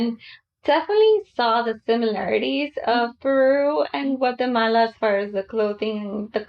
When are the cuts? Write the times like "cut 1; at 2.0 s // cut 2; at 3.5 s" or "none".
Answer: none